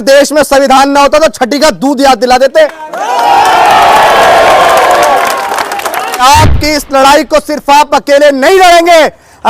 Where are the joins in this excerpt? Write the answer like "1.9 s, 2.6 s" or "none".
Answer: 6.2 s